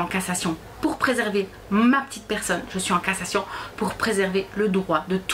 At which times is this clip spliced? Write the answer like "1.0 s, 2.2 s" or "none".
none